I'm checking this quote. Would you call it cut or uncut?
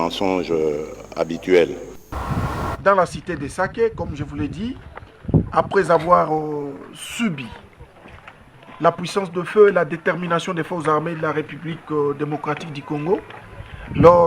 cut